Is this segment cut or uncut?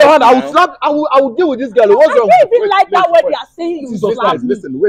uncut